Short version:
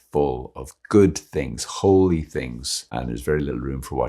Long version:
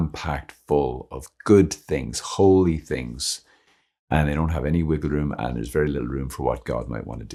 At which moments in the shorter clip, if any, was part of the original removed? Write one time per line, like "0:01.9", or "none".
0:02.9